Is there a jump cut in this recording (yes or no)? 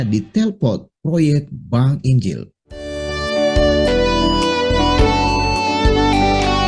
no